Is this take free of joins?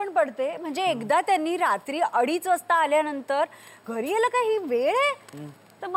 no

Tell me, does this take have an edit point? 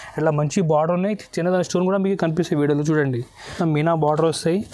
yes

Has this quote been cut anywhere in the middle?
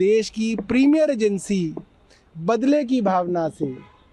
no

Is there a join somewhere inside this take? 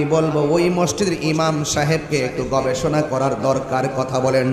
no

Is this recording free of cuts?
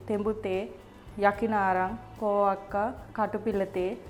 yes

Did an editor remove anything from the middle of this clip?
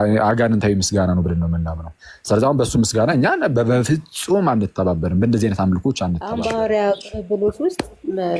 yes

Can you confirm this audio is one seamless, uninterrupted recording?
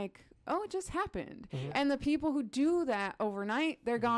yes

